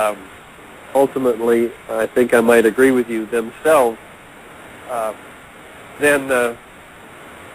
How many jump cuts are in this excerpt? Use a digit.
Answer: 0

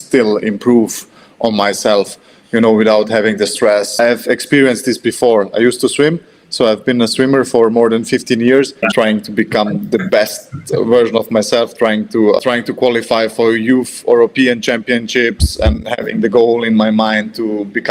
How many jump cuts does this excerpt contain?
3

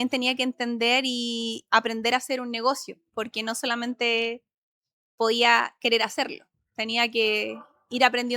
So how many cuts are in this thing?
0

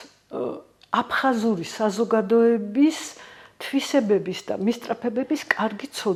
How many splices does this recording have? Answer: 0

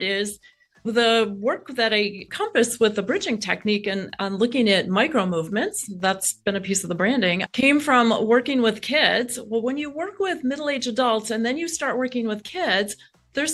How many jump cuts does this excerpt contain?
0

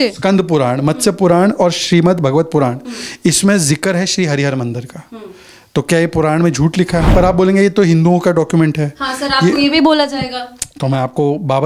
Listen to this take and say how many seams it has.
1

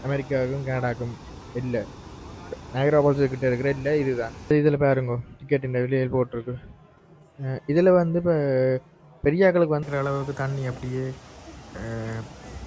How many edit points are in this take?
2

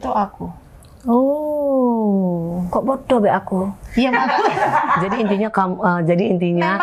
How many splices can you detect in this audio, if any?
1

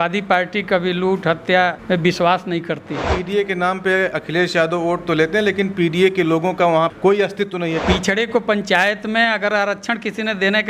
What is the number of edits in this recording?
2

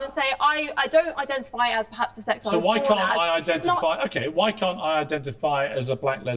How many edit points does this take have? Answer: 0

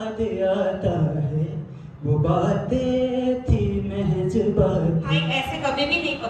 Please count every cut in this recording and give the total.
1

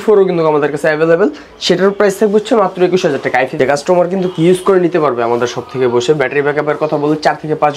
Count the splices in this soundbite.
1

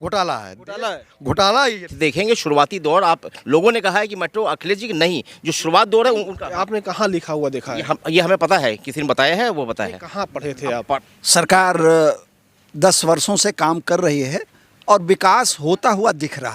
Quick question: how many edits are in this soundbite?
2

